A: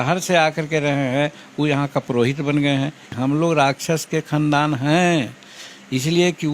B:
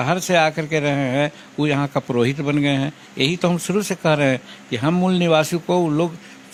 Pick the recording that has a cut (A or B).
A